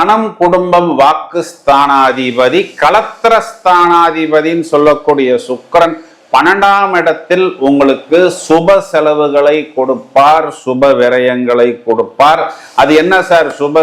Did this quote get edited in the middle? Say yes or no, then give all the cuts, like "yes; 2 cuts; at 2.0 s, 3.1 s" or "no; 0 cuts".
no; 0 cuts